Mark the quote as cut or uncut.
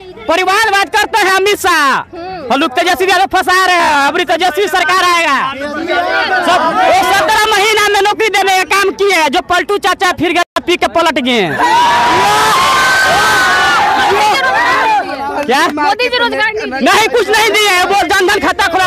uncut